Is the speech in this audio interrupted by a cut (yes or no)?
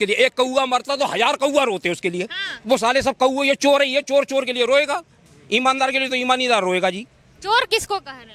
no